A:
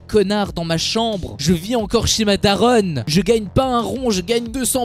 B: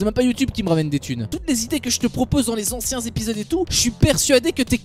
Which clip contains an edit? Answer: B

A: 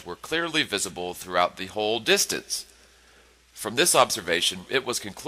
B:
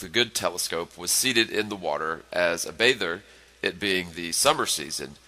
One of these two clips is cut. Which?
B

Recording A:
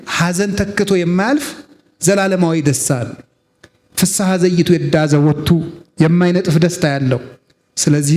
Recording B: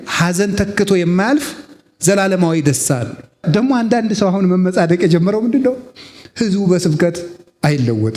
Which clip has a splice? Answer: B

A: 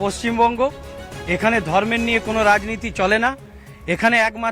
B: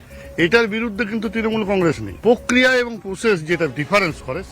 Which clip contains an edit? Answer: B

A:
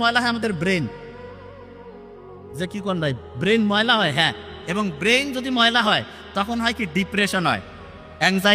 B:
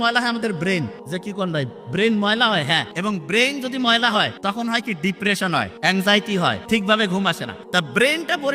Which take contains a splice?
B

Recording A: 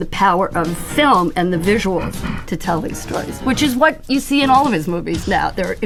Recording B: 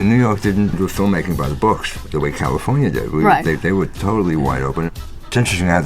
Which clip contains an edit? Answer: B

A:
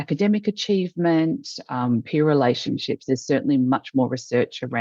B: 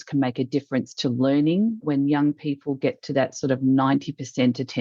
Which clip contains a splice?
B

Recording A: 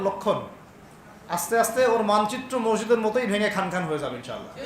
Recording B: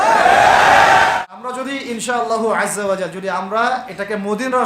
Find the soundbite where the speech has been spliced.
B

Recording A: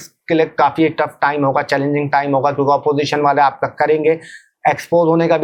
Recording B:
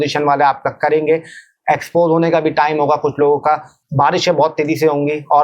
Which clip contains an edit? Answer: B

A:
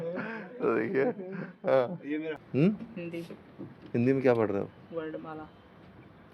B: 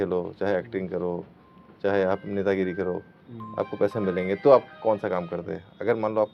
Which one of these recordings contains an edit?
A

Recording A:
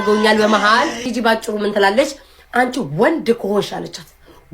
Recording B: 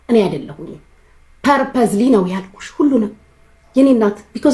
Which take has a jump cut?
A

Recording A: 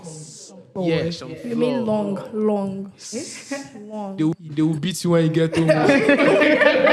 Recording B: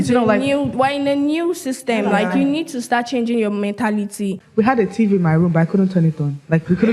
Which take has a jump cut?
B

